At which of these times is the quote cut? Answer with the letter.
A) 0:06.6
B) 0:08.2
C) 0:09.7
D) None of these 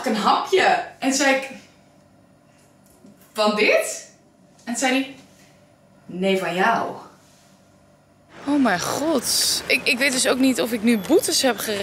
B